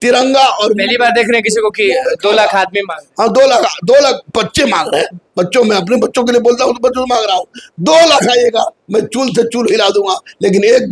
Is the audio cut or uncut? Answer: uncut